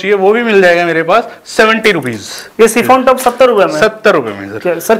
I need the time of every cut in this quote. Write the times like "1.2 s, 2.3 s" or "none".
none